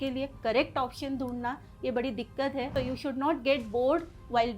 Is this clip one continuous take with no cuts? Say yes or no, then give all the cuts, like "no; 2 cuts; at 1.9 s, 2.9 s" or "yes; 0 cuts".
no; 1 cut; at 2.7 s